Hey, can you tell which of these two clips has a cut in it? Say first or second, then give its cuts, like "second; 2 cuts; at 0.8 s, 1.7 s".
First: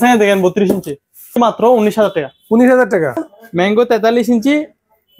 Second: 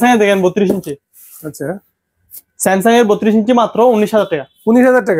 first; 2 cuts; at 1.4 s, 3.2 s